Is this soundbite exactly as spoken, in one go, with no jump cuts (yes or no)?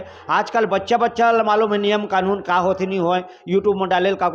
yes